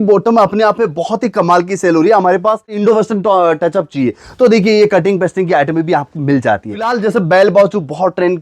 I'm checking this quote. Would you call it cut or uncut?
cut